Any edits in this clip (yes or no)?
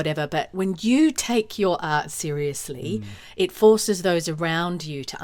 no